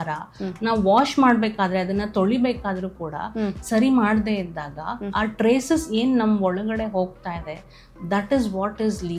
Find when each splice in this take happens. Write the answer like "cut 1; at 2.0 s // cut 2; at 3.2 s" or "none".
none